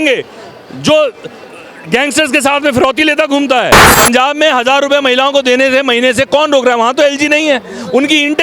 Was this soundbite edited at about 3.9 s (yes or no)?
yes